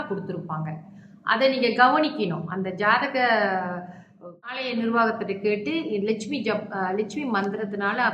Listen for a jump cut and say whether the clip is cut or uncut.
cut